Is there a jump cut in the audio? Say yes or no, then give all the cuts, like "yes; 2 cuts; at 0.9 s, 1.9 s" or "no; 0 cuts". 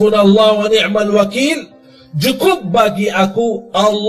no; 0 cuts